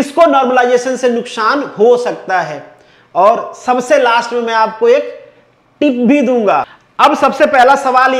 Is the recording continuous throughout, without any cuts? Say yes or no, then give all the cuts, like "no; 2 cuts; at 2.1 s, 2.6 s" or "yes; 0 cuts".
no; 1 cut; at 6.8 s